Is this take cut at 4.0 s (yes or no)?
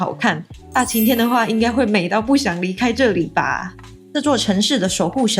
yes